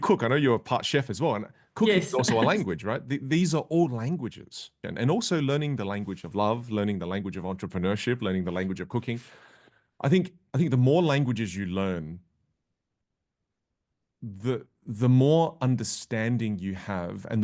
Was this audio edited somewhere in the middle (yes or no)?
yes